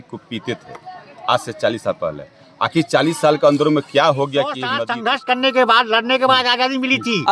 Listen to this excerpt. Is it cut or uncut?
cut